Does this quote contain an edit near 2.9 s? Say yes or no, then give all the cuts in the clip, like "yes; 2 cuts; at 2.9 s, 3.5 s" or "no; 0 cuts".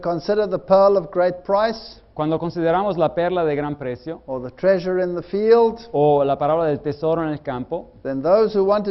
yes; 1 cut; at 2.9 s